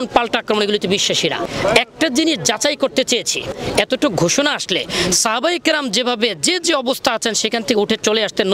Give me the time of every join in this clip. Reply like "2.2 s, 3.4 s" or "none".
1.4 s, 3.5 s